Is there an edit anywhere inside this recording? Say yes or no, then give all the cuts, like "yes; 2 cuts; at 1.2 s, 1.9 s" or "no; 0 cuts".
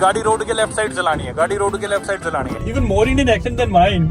yes; 1 cut; at 2.6 s